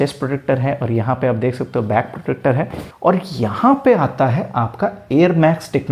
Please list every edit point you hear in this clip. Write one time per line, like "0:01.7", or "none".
0:02.8